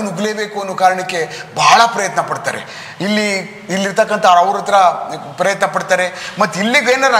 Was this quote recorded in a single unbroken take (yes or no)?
yes